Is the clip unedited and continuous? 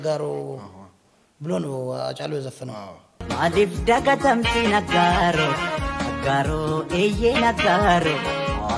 yes; 0 cuts

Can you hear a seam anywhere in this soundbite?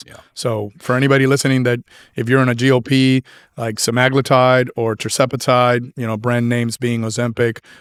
no; 0 cuts

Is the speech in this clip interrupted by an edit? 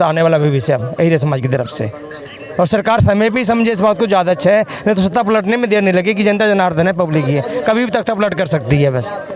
no; 0 cuts

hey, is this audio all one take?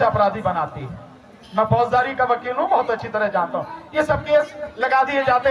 yes; 0 cuts

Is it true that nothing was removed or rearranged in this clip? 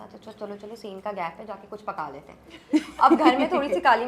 yes; 0 cuts

